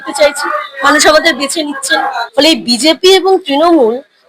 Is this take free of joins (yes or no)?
no